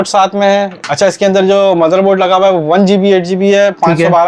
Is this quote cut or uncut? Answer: uncut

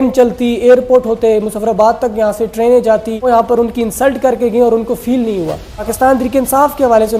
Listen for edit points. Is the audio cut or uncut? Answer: cut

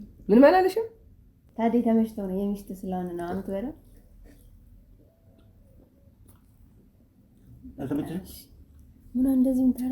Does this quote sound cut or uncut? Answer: cut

